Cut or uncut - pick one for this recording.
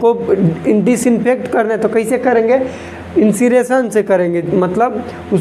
uncut